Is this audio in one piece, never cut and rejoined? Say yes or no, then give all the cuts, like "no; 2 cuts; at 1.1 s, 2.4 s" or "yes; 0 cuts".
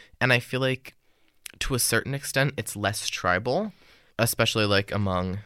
yes; 0 cuts